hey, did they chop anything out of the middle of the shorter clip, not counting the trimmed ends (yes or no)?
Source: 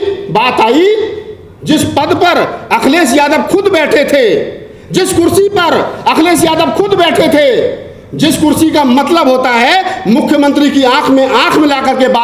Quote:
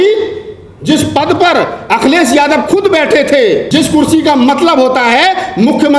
yes